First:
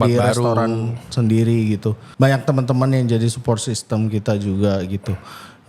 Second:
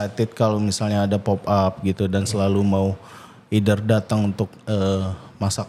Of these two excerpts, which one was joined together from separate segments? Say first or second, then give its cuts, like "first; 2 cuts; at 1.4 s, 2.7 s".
first; 1 cut; at 2.0 s